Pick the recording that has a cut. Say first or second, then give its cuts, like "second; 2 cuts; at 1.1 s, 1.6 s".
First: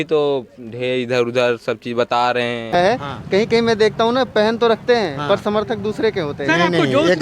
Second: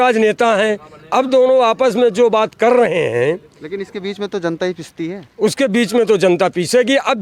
first; 1 cut; at 2.7 s